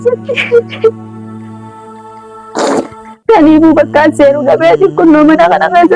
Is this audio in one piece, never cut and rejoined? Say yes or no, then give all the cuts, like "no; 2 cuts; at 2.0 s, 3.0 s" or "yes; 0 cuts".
yes; 0 cuts